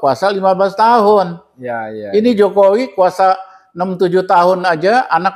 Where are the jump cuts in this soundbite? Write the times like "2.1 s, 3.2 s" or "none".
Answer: none